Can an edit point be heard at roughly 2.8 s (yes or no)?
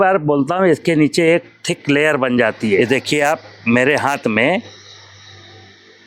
yes